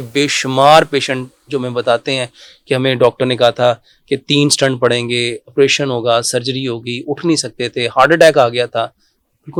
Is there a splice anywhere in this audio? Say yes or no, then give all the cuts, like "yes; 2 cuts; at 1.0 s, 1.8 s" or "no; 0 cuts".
no; 0 cuts